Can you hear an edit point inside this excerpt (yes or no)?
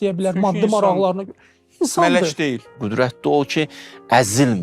yes